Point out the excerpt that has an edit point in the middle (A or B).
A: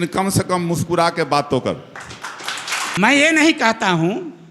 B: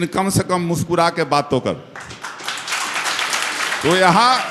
A